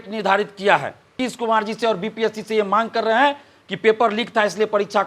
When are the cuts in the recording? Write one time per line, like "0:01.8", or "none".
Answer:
0:01.1